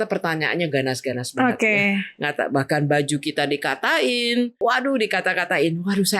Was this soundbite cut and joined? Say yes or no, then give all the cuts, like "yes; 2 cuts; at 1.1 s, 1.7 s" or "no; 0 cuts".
yes; 1 cut; at 4.6 s